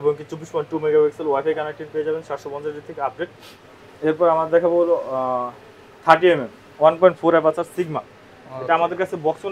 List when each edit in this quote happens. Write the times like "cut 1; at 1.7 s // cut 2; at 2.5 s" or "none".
cut 1; at 3.4 s